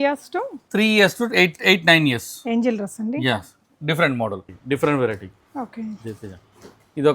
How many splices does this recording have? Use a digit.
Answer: 1